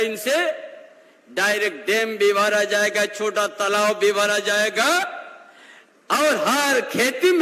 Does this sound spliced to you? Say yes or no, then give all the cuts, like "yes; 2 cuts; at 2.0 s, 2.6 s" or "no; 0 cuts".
no; 0 cuts